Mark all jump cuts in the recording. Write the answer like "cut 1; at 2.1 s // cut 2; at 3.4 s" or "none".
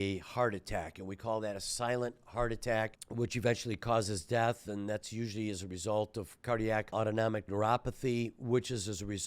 cut 1; at 3.0 s // cut 2; at 6.9 s